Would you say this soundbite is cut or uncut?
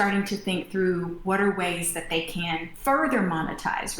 cut